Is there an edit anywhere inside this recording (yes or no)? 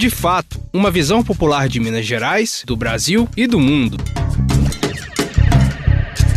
no